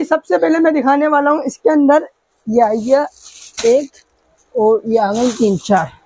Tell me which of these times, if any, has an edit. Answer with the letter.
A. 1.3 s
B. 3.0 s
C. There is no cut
C